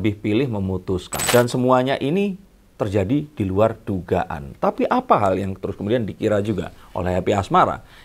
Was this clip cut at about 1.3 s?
yes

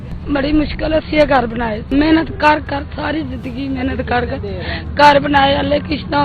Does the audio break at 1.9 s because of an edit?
yes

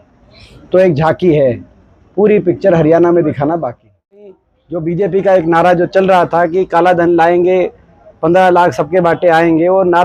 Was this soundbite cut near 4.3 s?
yes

